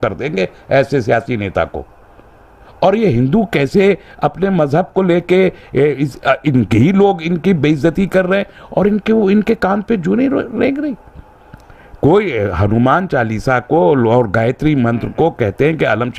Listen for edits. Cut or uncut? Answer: uncut